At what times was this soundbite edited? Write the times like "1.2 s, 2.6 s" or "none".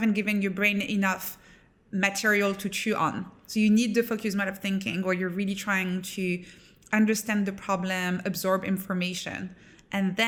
none